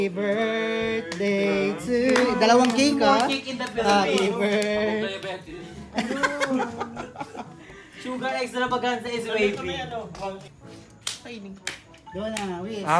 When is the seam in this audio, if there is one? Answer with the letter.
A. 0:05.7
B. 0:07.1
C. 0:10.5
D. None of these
C